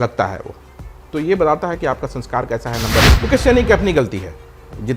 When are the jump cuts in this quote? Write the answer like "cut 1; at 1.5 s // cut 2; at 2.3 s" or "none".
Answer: cut 1; at 3.2 s